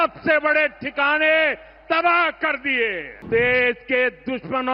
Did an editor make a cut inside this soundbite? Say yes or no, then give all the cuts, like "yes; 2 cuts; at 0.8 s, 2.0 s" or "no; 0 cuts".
yes; 1 cut; at 3.2 s